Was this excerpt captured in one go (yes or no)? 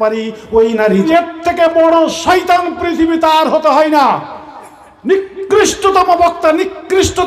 no